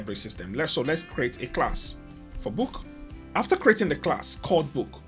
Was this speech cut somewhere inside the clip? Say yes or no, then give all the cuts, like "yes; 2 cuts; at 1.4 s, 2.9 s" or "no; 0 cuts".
no; 0 cuts